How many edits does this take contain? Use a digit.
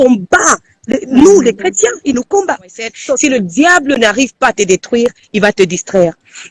1